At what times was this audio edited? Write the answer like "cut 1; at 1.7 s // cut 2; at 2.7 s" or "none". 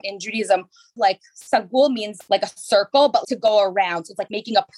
cut 1; at 1.0 s